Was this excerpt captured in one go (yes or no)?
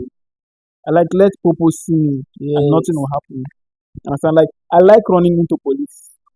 yes